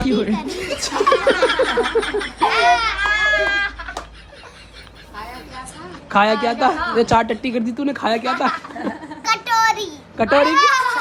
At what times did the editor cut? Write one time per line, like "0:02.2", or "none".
none